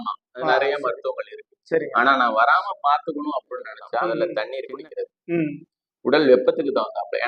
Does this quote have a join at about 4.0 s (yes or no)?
yes